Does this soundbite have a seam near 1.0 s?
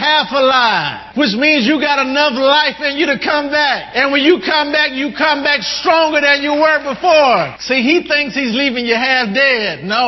yes; 3 cuts; at 1.0 s, 3.8 s, 7.6 s

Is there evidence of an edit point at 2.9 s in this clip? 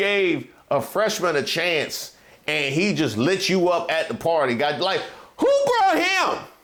no; 0 cuts

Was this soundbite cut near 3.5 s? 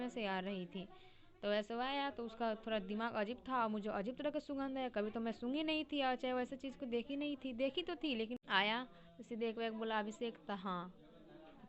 no; 1 cut; at 8.4 s

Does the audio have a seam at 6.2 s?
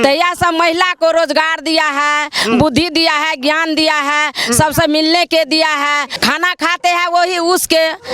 yes; 1 cut; at 6.2 s

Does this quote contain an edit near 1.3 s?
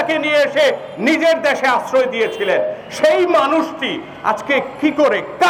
no; 0 cuts

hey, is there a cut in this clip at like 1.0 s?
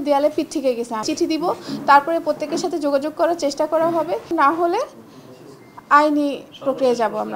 yes; 2 cuts; at 1.0 s, 4.3 s

